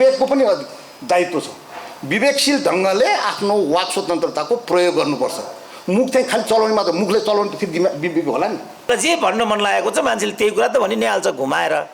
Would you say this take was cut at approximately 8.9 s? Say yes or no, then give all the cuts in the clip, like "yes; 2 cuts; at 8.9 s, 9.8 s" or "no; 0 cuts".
yes; 1 cut; at 8.9 s